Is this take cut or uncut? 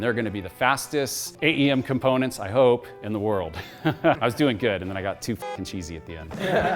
cut